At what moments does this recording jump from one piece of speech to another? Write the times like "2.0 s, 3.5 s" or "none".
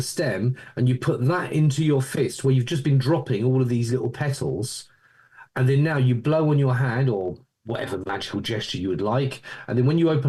none